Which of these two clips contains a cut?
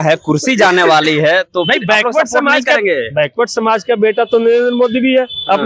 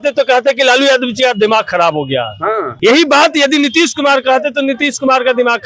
second; 1 cut; at 2.7 s

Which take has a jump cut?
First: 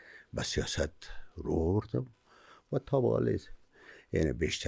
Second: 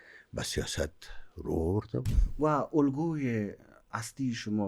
second; 1 cut; at 2.2 s

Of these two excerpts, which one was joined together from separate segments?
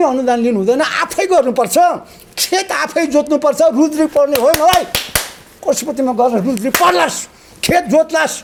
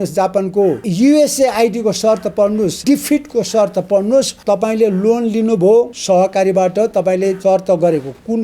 second; 5 cuts; at 0.8 s, 2.8 s, 4.3 s, 6.0 s, 7.4 s

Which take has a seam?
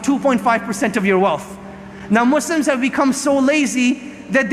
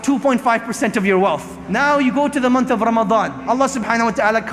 second; 2 cuts; at 1.7 s, 3.3 s

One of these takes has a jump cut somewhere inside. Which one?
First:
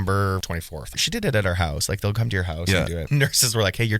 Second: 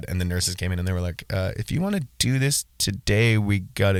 first; 2 cuts; at 1.0 s, 3.0 s

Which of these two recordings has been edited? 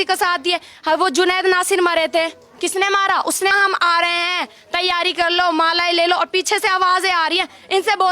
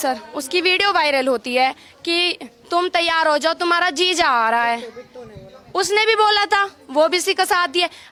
first; 1 cut; at 3.5 s

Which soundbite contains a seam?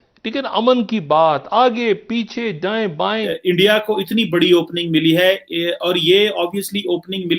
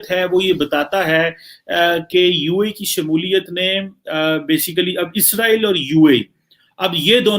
first; 1 cut; at 3.3 s

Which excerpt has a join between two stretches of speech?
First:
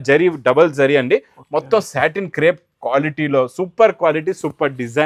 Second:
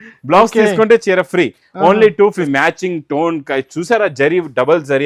second; 1 cut; at 2.5 s

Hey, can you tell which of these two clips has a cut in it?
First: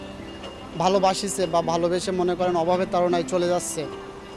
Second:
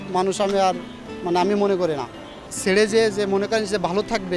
second; 1 cut; at 2.5 s

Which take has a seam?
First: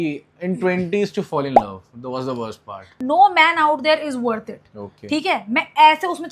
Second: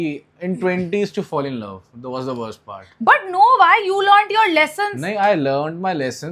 first; 1 cut; at 2.9 s

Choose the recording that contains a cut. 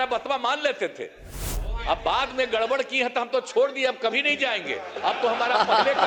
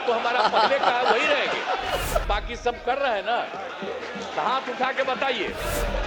second; 1 cut; at 2.2 s

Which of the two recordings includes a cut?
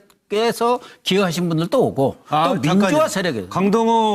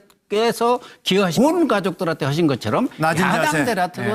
first; 1 cut; at 1.4 s

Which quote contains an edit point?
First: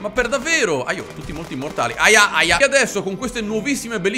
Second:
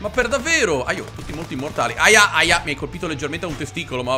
first; 1 cut; at 2.6 s

